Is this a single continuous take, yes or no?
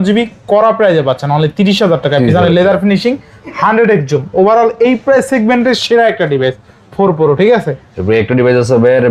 yes